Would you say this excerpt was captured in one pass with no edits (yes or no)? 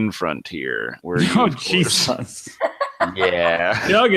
no